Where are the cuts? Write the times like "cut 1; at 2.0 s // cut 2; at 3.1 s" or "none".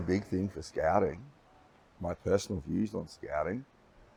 none